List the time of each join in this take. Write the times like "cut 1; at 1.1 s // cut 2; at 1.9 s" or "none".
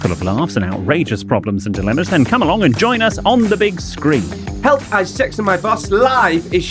none